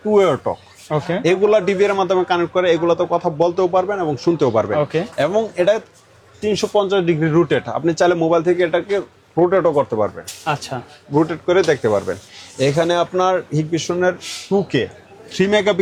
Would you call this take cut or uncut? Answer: uncut